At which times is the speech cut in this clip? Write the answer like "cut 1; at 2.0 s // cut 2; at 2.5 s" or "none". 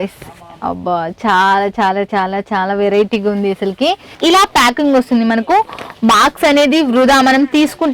cut 1; at 4.1 s